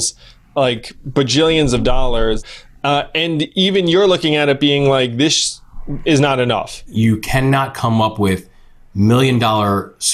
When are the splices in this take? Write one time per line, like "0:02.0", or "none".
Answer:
0:02.4
0:06.8